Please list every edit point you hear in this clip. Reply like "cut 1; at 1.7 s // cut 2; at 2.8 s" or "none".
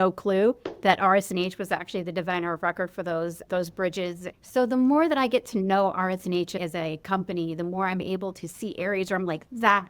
cut 1; at 4.2 s